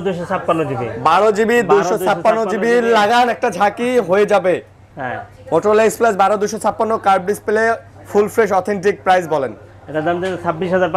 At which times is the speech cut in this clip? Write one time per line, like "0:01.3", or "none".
none